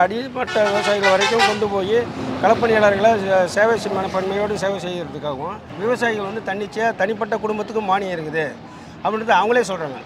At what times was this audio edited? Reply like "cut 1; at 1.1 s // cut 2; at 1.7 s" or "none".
cut 1; at 5.7 s